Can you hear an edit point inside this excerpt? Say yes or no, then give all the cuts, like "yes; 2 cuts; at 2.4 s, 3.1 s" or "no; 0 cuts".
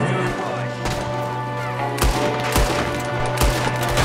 no; 0 cuts